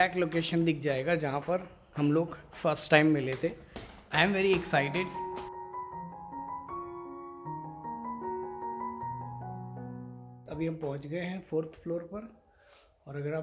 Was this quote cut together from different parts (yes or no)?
no